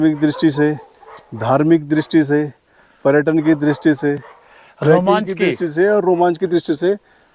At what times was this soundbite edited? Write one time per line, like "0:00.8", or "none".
none